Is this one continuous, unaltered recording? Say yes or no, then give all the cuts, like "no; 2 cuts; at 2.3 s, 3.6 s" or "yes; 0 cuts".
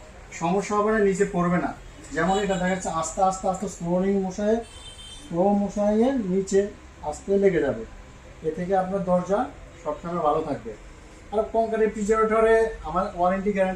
yes; 0 cuts